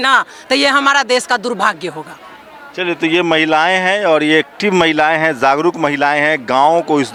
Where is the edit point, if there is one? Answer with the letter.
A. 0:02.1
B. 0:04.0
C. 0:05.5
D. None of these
D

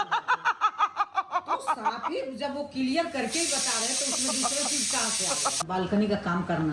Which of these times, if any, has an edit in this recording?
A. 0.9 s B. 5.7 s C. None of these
B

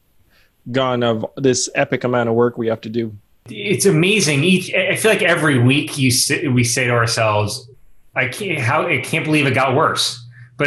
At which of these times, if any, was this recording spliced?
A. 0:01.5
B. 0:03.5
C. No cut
B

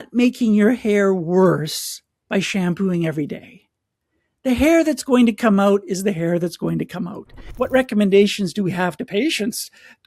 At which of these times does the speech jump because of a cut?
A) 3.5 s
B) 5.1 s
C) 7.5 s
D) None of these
C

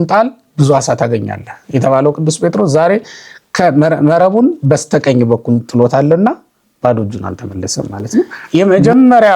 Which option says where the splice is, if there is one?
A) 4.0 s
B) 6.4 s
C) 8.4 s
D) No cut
C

